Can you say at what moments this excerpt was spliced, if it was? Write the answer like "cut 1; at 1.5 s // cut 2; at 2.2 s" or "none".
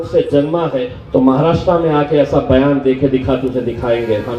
cut 1; at 1.0 s